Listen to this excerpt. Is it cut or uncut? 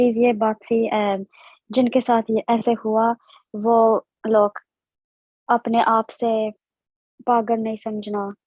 uncut